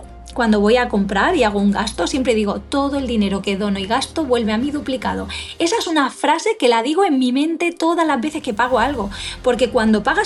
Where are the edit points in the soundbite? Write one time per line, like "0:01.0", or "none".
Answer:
none